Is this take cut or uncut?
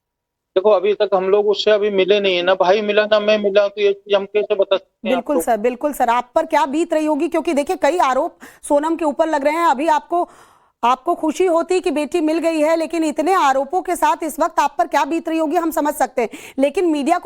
cut